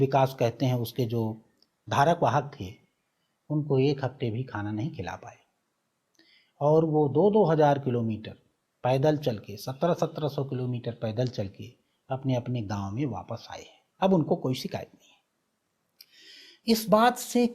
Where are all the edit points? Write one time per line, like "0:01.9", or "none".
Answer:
0:13.8